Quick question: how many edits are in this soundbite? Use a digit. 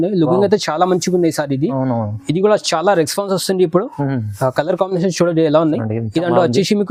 0